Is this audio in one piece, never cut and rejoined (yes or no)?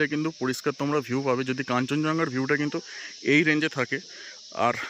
yes